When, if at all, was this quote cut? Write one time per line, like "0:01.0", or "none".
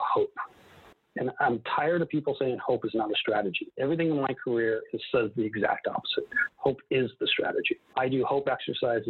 none